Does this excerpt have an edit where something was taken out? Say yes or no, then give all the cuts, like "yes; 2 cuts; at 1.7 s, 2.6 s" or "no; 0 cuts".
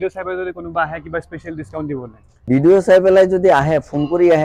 yes; 1 cut; at 2.5 s